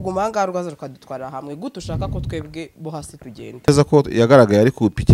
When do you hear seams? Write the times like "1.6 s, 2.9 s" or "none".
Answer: 3.7 s